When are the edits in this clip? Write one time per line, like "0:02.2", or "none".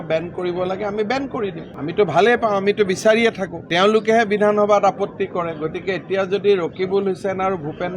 none